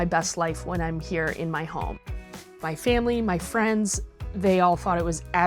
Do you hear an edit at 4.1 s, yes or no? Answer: no